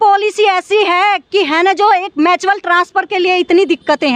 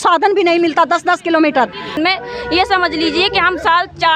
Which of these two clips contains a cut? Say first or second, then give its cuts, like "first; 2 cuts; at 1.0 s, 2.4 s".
second; 1 cut; at 2.0 s